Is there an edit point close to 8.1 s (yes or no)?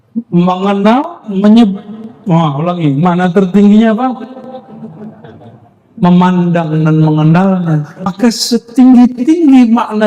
yes